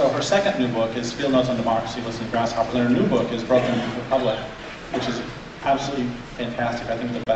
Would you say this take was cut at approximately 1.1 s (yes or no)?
yes